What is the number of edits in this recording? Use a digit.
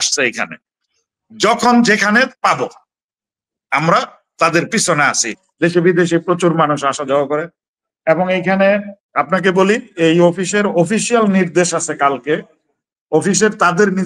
1